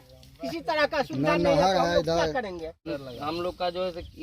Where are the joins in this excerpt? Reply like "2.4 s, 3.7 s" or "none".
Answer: 2.9 s